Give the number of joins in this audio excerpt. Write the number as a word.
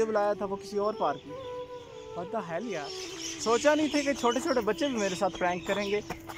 one